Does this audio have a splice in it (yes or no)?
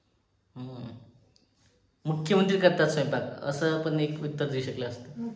no